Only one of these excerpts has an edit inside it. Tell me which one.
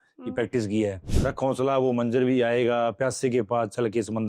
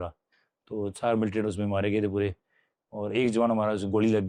first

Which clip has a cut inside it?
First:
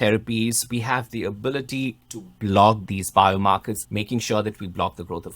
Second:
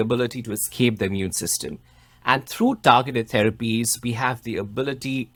first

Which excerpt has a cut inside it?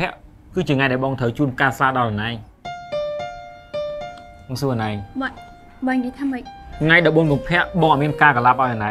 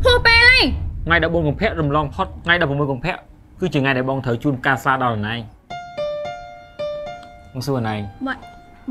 second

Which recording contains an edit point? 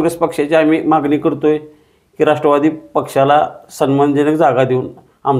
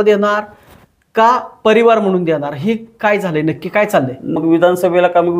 second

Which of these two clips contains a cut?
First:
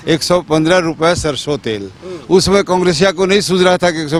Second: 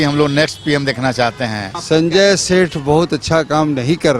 second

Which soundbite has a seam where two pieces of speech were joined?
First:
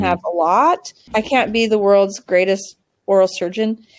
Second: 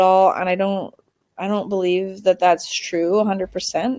first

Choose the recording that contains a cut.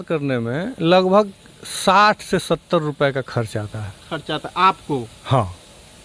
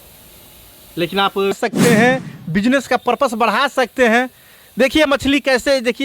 second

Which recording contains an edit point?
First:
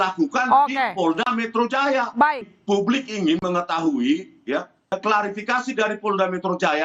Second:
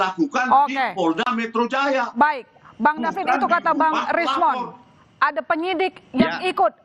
first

